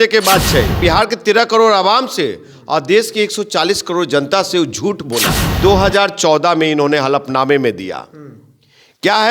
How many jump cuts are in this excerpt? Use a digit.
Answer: 2